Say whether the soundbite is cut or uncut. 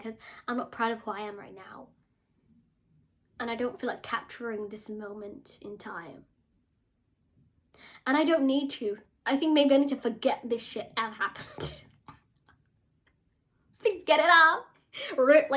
uncut